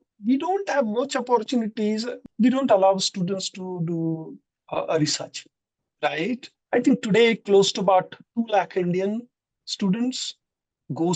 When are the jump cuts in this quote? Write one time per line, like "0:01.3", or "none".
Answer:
0:02.1
0:06.5